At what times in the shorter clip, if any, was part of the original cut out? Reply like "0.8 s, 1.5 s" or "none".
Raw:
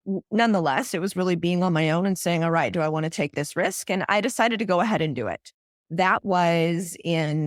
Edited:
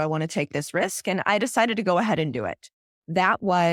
none